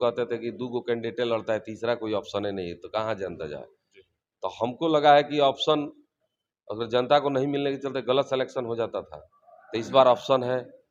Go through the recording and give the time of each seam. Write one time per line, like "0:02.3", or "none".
none